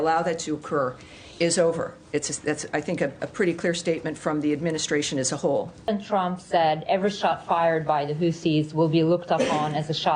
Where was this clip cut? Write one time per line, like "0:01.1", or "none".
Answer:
0:05.9